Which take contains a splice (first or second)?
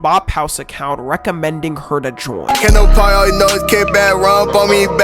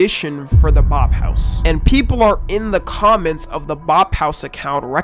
first